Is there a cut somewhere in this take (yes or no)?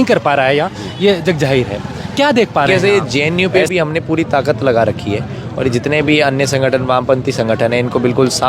yes